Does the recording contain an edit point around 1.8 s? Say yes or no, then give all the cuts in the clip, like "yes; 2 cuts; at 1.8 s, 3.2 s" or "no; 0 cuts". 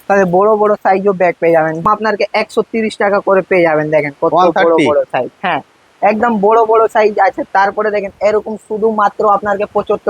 yes; 1 cut; at 1.8 s